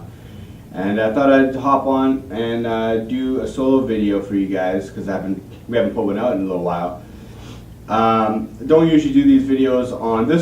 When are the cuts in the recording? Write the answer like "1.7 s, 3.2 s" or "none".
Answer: 4.3 s